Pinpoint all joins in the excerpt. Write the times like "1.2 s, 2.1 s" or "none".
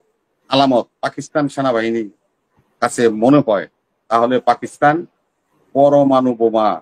none